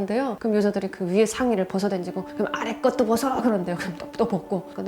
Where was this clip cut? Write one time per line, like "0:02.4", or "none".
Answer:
none